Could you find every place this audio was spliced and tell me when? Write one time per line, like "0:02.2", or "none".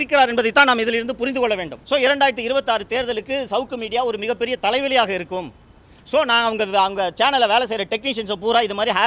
0:01.7

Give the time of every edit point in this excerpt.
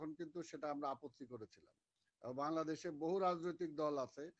none

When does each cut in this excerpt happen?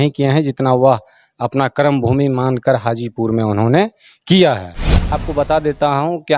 0:05.2

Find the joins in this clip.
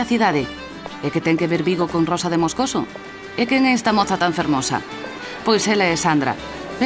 0:01.2

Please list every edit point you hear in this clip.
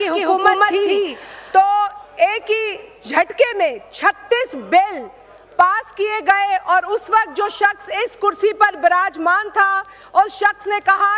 none

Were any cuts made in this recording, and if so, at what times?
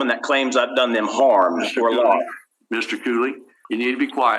0:03.5

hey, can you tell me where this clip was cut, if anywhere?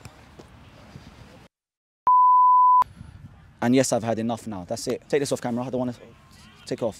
0:03.0
0:05.0

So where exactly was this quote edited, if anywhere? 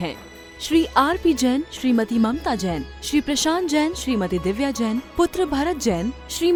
none

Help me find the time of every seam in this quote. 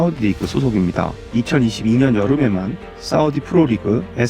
0:01.2

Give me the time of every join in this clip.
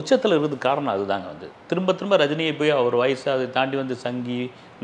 none

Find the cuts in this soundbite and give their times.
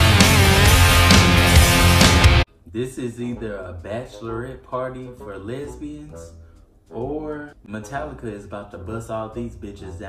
none

